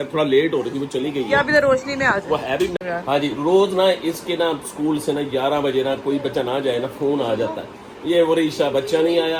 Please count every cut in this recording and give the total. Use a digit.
0